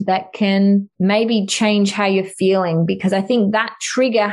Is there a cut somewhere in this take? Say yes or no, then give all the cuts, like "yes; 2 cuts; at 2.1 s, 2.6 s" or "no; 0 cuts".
yes; 1 cut; at 0.9 s